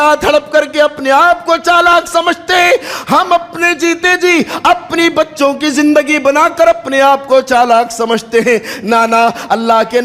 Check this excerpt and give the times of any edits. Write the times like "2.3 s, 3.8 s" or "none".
none